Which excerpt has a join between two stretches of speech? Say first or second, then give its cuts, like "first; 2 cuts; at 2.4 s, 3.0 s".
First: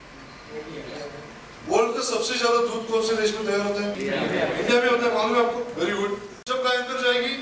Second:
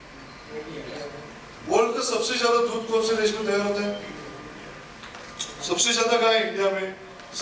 first; 2 cuts; at 4.0 s, 6.3 s